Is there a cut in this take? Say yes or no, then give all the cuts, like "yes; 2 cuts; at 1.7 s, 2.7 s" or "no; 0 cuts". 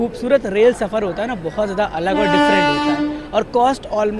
no; 0 cuts